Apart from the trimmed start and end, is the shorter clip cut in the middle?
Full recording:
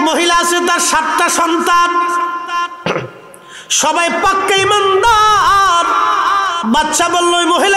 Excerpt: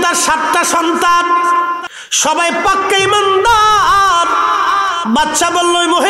yes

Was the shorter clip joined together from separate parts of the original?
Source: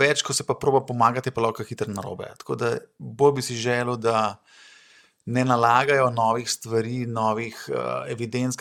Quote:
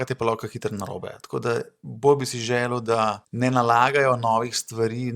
yes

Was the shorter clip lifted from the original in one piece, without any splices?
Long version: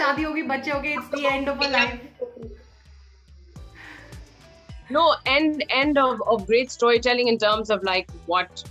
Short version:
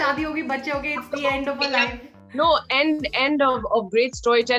no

